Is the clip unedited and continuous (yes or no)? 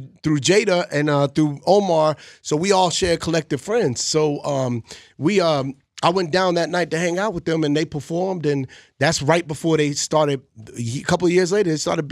yes